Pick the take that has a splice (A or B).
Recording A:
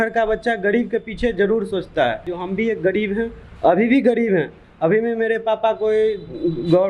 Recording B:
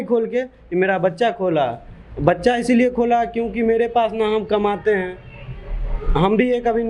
A